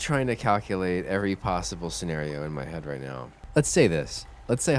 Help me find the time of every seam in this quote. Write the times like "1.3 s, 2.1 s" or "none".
3.4 s